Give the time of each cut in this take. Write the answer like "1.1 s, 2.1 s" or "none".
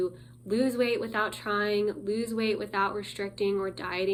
none